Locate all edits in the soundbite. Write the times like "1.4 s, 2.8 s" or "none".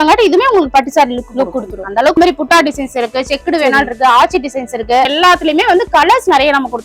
2.2 s, 5.1 s